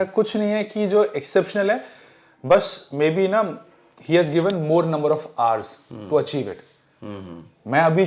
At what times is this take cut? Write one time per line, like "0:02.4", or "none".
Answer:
none